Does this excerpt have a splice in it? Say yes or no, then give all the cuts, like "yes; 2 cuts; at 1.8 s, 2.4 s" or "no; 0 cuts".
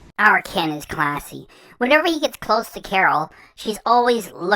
no; 0 cuts